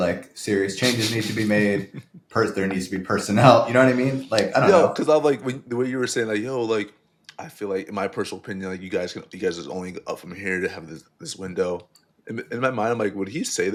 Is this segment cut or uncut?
uncut